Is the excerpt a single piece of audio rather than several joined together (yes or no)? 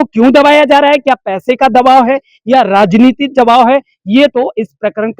yes